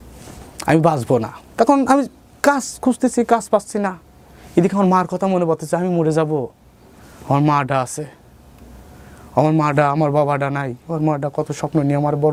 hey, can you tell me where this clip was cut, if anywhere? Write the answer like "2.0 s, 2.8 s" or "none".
none